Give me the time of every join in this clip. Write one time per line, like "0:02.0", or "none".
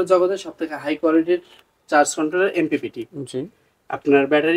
none